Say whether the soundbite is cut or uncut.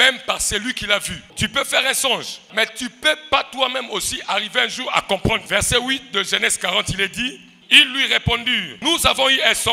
cut